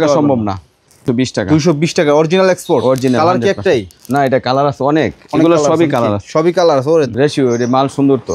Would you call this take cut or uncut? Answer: cut